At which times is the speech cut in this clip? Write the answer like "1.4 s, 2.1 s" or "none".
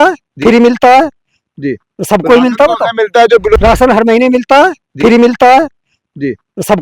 3.6 s